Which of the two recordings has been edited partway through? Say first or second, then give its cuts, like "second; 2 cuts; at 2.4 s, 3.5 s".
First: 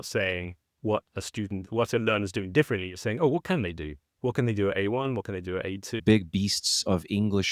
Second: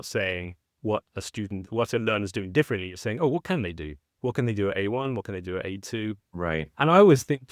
first; 1 cut; at 6.0 s